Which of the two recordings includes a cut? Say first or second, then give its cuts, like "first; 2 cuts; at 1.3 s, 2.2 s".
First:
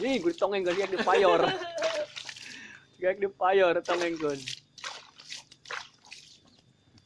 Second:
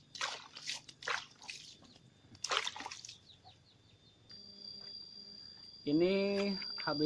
second; 1 cut; at 4.3 s